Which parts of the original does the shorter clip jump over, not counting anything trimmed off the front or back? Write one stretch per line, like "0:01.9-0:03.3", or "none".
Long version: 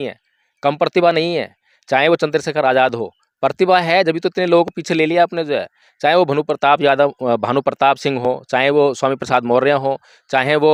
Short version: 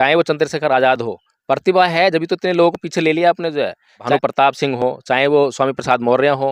0:06.0-0:07.5

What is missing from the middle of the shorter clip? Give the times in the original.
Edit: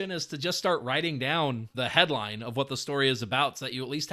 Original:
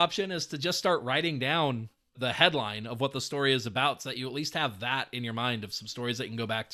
0:01.9-0:02.1

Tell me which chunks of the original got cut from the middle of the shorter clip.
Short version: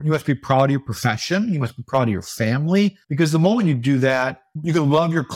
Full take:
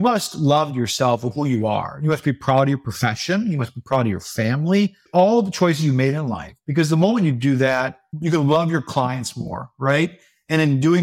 0:05.0-0:06.6

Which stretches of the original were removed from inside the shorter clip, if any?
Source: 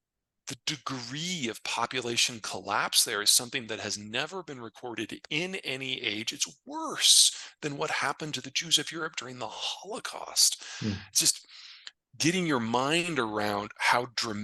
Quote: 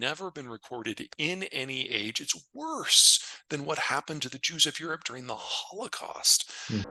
none

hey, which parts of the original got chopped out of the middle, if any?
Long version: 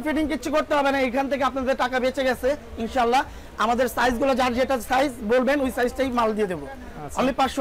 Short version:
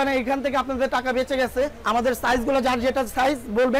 0:02.6-0:03.5

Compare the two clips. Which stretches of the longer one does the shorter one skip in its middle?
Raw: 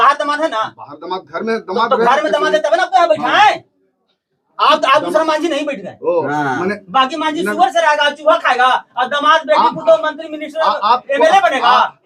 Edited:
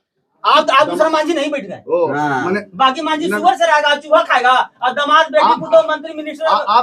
none

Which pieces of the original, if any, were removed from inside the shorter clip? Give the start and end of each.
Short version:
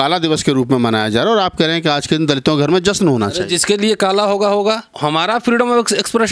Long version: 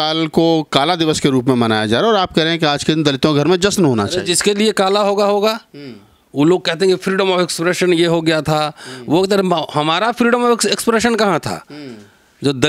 0:05.7-0:09.7

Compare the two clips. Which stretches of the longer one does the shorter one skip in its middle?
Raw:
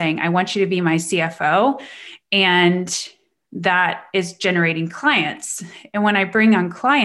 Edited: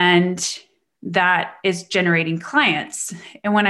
none

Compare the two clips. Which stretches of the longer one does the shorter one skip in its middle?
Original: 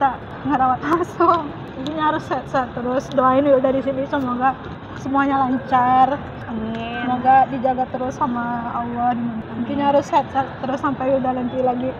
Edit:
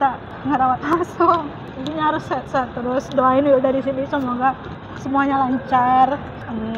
none

